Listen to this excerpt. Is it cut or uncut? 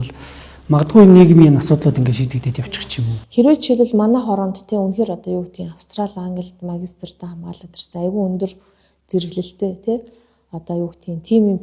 uncut